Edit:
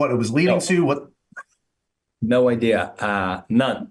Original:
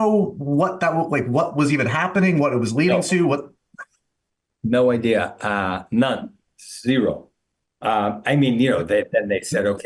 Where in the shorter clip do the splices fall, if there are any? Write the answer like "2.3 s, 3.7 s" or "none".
none